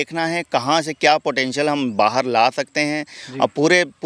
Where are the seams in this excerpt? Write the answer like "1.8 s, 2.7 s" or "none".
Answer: none